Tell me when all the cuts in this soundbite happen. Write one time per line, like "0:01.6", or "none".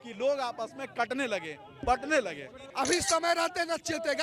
0:02.7